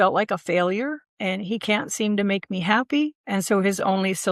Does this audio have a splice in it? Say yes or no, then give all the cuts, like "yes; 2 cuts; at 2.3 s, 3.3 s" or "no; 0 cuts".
yes; 2 cuts; at 1.1 s, 3.2 s